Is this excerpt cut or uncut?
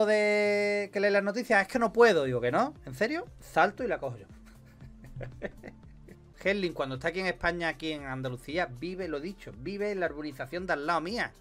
cut